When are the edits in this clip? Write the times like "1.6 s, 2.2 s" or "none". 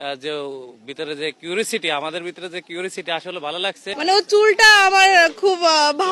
3.9 s